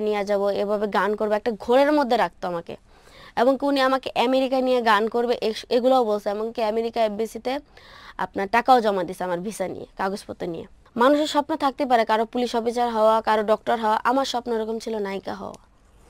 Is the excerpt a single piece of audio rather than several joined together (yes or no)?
no